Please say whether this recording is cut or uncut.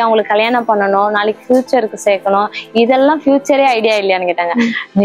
uncut